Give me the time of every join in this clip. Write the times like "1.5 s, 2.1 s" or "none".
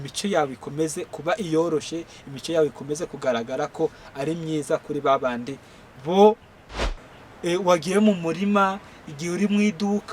6.8 s